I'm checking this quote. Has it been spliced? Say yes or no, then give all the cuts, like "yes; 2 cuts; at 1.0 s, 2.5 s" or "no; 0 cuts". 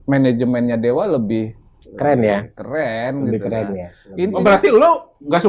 no; 0 cuts